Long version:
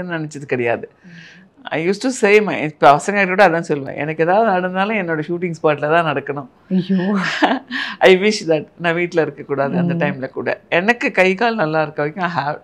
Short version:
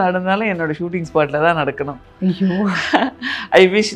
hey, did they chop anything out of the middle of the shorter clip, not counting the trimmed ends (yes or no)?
no